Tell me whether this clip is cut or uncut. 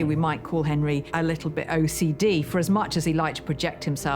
uncut